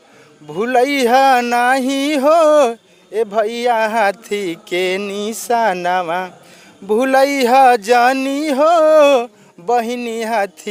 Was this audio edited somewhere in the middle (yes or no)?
no